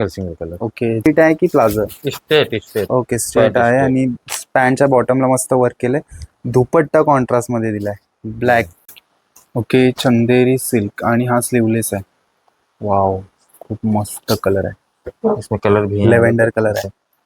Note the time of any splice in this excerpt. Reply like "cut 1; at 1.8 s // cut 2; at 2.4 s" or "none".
cut 1; at 1.1 s // cut 2; at 8.8 s